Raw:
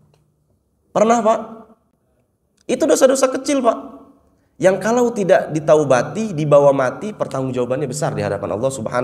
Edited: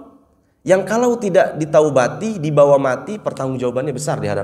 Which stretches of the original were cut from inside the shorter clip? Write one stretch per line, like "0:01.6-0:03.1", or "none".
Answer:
none